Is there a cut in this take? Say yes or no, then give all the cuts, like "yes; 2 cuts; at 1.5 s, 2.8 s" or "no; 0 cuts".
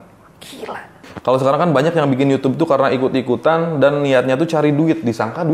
yes; 1 cut; at 1.1 s